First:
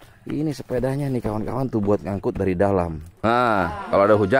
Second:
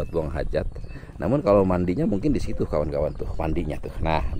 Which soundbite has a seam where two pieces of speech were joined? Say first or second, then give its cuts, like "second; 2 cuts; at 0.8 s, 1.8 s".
first; 1 cut; at 3.1 s